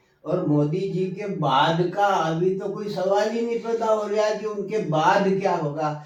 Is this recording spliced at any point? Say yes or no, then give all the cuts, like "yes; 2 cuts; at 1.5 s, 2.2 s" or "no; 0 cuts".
no; 0 cuts